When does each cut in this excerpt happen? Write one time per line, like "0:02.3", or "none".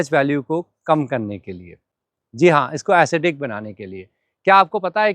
none